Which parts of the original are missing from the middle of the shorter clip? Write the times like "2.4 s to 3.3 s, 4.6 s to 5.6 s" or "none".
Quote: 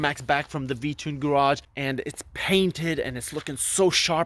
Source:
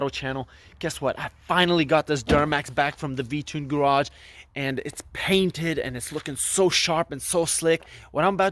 4.2 s to 4.5 s